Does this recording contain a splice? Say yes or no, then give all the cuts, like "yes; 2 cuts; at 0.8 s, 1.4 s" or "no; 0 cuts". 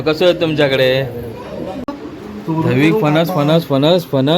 yes; 1 cut; at 1.8 s